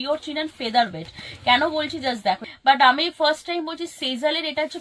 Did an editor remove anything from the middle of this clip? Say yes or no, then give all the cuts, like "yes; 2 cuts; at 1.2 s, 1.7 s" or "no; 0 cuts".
yes; 1 cut; at 2.5 s